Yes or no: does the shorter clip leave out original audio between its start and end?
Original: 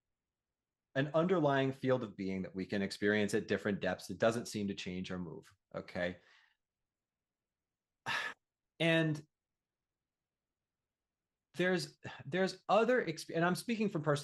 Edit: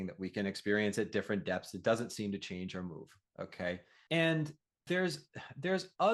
yes